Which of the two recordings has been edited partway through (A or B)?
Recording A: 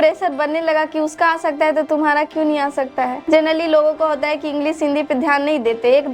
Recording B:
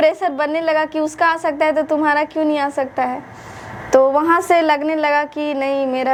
A